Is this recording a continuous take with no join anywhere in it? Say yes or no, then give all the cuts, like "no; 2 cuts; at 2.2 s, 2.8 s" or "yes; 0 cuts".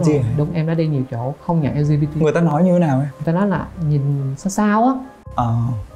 yes; 0 cuts